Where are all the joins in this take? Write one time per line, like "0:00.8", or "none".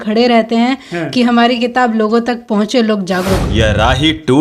0:03.4